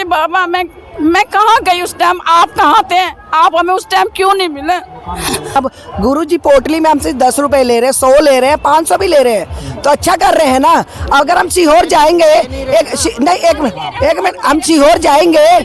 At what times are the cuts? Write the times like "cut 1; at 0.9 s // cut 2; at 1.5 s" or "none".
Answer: cut 1; at 5.6 s